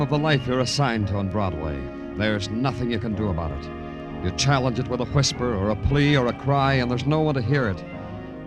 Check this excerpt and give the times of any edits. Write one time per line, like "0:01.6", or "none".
0:05.3